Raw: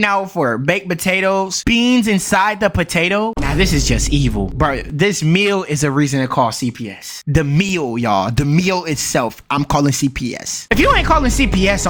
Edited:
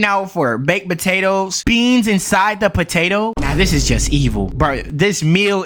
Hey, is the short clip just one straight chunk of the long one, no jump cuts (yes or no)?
yes